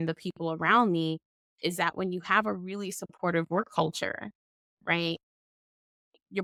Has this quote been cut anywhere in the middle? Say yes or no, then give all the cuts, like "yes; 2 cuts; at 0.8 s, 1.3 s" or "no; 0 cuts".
no; 0 cuts